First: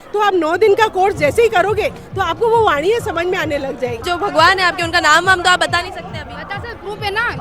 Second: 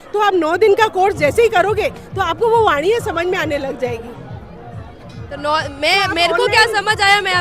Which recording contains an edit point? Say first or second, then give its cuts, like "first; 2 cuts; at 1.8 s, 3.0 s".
first; 1 cut; at 4.0 s